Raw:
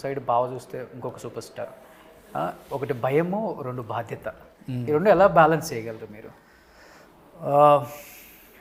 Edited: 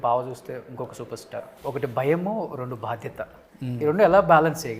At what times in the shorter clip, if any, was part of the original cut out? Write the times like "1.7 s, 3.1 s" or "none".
1.6 s